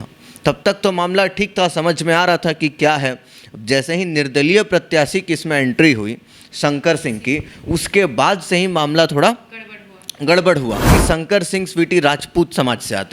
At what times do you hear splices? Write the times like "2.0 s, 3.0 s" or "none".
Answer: 10.9 s